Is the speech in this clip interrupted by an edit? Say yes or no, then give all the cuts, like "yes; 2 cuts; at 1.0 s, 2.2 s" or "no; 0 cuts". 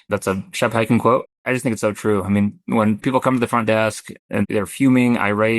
yes; 1 cut; at 1.3 s